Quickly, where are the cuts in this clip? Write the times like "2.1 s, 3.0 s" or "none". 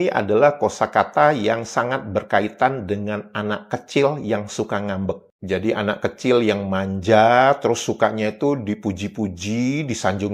none